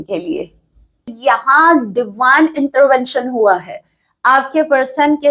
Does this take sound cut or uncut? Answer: cut